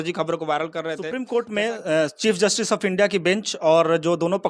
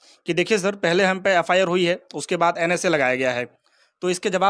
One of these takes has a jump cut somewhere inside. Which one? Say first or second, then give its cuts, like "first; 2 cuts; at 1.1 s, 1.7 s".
first; 1 cut; at 1.0 s